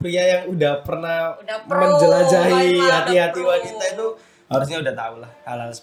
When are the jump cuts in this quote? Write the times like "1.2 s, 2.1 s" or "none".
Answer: none